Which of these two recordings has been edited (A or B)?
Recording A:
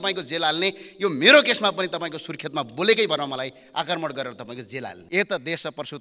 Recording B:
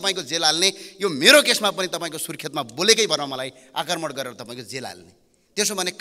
A